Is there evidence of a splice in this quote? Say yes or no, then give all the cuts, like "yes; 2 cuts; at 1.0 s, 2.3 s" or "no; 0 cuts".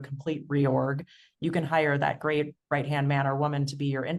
no; 0 cuts